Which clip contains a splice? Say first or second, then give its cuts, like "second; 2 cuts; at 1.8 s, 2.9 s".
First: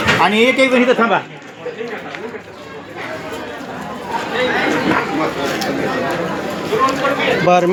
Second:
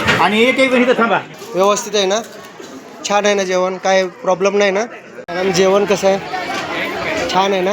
second; 2 cuts; at 1.4 s, 5.3 s